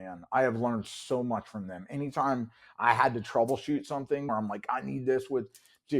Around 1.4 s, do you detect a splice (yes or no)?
no